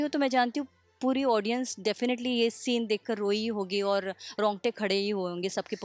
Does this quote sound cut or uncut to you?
uncut